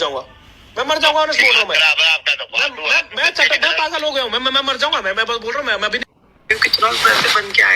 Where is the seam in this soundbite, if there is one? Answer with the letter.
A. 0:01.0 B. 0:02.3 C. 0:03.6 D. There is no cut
D